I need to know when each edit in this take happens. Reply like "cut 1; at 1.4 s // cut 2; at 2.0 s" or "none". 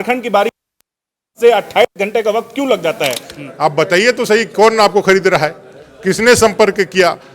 cut 1; at 3.3 s